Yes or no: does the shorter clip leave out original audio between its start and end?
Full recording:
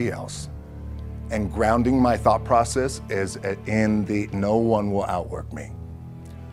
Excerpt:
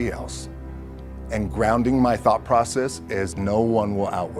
yes